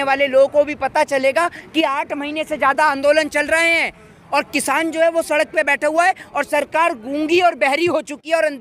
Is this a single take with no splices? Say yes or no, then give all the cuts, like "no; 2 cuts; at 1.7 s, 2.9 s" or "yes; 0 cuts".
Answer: yes; 0 cuts